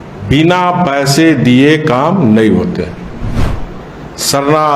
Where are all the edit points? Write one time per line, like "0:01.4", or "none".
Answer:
0:03.4